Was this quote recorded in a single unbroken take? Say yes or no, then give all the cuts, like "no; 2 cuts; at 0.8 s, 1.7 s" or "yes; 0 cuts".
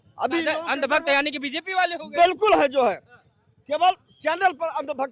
yes; 0 cuts